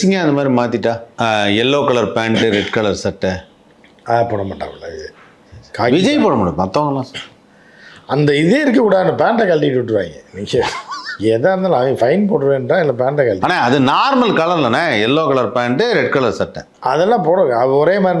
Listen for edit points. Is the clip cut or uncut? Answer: cut